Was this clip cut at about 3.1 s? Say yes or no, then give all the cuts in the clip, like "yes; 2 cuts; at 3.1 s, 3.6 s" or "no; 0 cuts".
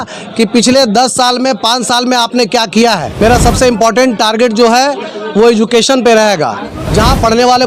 yes; 2 cuts; at 3.1 s, 6.7 s